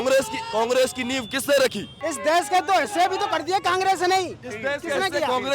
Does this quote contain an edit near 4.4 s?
no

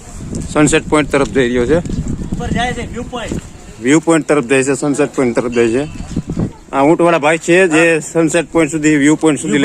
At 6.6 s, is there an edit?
yes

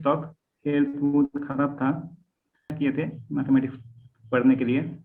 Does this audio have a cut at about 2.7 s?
yes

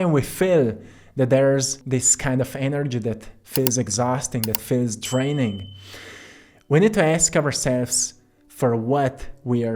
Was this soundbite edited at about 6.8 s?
no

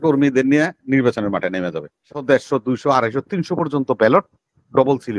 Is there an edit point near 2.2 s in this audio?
yes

